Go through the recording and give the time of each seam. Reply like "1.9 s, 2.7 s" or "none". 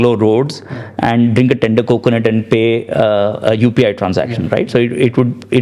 none